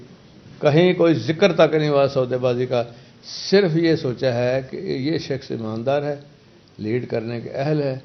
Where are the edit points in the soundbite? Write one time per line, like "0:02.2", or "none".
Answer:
none